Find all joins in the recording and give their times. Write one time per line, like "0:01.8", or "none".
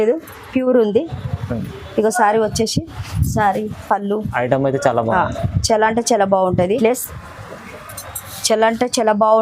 0:06.8